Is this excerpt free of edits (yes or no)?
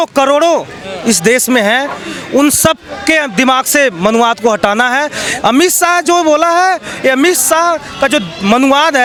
yes